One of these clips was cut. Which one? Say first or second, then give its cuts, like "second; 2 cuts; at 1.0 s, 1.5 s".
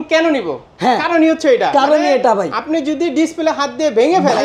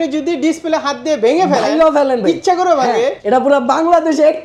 second; 1 cut; at 3.2 s